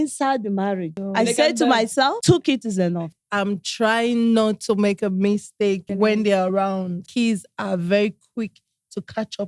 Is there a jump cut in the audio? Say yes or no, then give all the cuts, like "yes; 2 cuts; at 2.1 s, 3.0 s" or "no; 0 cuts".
yes; 5 cuts; at 1.0 s, 2.2 s, 3.2 s, 5.9 s, 7.1 s